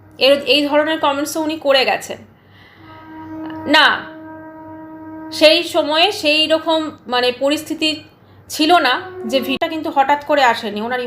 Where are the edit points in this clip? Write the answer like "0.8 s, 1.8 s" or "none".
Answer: 9.7 s